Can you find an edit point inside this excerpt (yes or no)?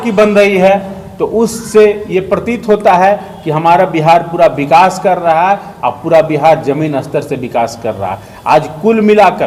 no